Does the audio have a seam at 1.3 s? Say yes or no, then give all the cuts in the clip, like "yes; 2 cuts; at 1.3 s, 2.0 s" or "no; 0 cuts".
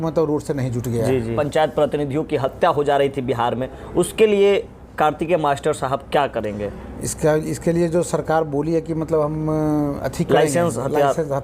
yes; 1 cut; at 1.3 s